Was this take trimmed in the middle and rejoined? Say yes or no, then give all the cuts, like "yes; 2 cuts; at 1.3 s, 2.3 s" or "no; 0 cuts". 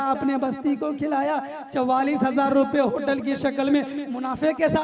no; 0 cuts